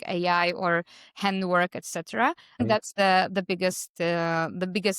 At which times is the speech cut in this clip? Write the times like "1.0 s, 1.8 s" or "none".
2.6 s